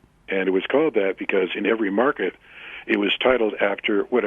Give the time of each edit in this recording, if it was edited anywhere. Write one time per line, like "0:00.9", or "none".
none